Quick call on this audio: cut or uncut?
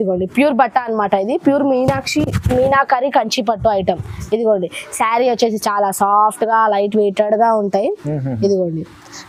uncut